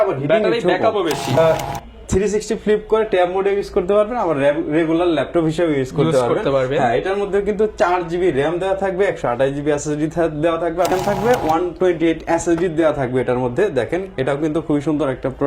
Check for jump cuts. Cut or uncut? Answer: cut